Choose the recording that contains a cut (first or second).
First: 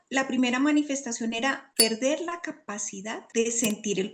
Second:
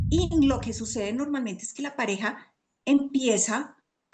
first